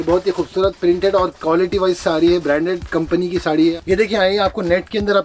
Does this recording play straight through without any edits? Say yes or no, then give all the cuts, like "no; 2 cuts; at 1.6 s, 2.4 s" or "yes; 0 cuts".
no; 1 cut; at 3.5 s